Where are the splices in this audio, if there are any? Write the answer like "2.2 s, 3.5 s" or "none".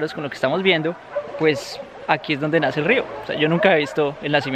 none